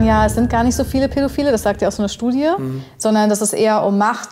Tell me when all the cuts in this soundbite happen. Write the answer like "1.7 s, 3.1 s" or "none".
none